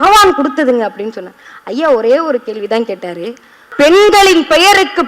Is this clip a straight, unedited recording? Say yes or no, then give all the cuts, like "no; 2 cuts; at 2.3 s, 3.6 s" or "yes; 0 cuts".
no; 1 cut; at 3.6 s